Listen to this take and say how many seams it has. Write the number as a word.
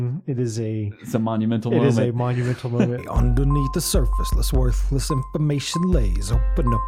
one